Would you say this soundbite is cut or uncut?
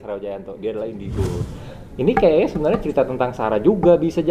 cut